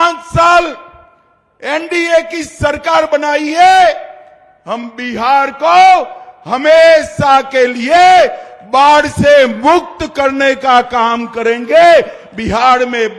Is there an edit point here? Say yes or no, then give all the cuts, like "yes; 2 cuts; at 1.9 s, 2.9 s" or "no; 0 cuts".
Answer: no; 0 cuts